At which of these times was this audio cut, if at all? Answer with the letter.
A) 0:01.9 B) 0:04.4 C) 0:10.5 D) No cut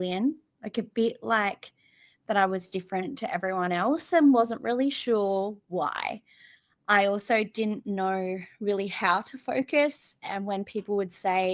D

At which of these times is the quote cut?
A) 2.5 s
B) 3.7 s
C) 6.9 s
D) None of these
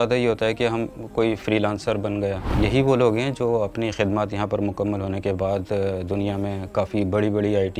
A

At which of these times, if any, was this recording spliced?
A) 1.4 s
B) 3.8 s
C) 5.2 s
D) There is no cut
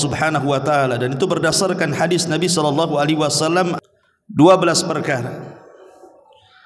B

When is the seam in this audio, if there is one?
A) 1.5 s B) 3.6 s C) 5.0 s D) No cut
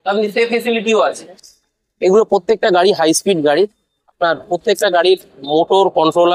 A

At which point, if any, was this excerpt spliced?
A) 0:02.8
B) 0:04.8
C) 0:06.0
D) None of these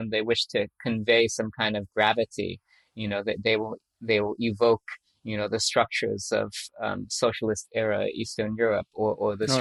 D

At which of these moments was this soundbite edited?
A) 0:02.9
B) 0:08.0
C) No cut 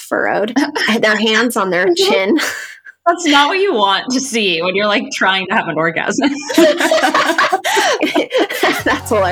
B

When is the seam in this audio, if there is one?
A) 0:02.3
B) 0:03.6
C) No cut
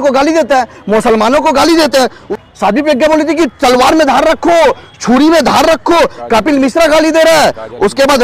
A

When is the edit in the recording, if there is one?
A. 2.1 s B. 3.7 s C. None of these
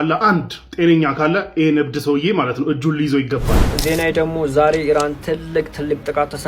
B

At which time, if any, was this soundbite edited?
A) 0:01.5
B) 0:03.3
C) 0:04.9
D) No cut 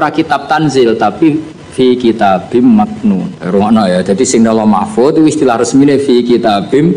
B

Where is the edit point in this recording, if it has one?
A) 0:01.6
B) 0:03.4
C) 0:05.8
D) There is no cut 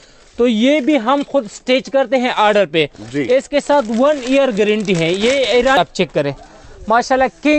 C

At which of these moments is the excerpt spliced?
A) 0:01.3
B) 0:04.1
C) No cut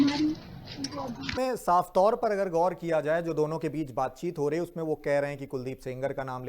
A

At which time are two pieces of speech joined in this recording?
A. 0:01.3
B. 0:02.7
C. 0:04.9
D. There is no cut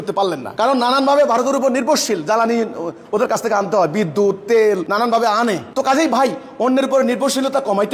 C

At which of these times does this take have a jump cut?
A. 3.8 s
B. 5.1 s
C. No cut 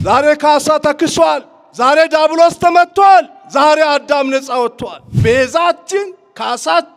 B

